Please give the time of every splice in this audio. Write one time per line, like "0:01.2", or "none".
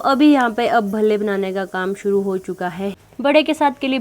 0:03.0